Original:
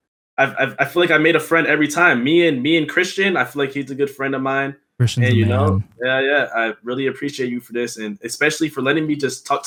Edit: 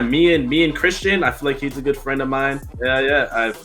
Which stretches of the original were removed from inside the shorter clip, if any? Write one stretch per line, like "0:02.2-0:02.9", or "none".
0:04.8-0:05.9